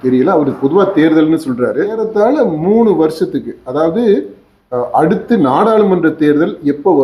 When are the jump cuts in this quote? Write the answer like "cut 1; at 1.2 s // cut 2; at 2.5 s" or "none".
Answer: cut 1; at 2.0 s